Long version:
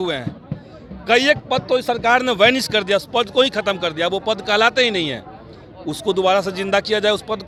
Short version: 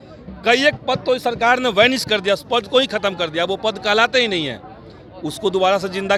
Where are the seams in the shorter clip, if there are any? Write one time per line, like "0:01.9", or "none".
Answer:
none